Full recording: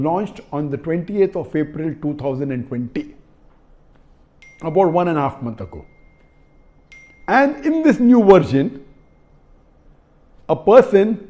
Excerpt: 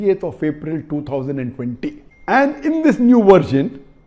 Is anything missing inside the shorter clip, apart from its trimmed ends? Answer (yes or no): yes